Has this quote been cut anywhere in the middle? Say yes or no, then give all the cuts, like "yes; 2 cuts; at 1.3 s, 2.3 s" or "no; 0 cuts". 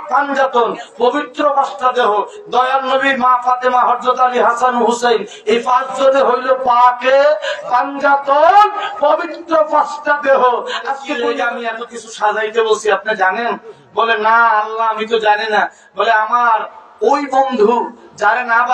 yes; 1 cut; at 11.0 s